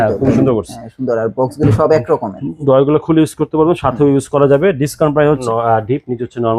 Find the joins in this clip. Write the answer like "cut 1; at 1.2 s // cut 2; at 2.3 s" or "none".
cut 1; at 5.4 s